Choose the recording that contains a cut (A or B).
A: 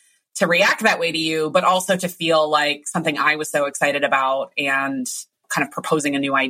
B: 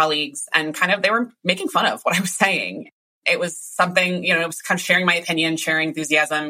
B